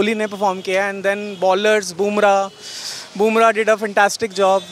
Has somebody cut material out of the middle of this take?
no; 0 cuts

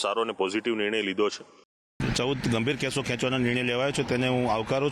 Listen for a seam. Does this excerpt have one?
yes; 1 cut; at 1.7 s

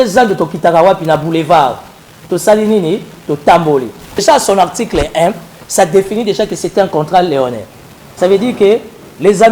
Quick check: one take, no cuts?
no; 1 cut; at 4.2 s

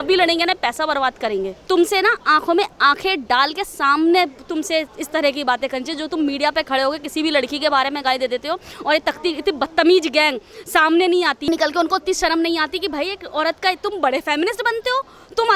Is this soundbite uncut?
no; 1 cut; at 1.5 s

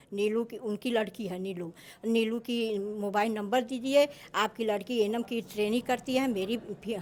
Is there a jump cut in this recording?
no; 0 cuts

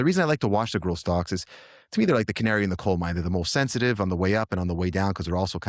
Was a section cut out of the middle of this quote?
no; 0 cuts

